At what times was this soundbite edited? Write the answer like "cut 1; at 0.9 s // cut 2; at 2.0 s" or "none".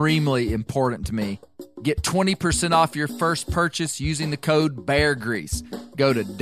cut 1; at 1.6 s